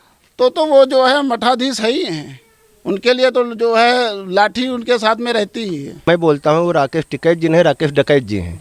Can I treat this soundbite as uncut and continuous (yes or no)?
no